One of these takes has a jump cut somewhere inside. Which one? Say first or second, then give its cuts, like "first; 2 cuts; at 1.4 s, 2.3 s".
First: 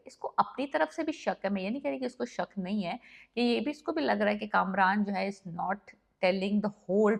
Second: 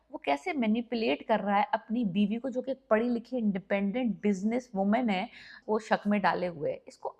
second; 1 cut; at 5.6 s